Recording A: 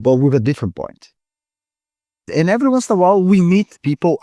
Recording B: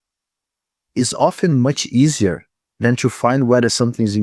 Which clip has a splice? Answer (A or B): A